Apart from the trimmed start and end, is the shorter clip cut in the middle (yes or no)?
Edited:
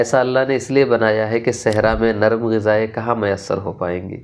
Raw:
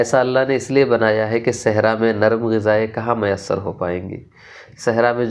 no